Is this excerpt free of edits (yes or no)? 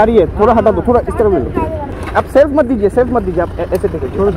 no